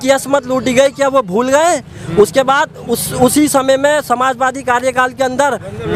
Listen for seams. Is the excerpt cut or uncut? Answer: uncut